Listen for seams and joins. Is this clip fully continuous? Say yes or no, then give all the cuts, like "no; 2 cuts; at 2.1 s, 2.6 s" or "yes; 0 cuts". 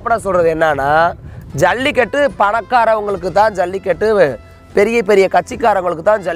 yes; 0 cuts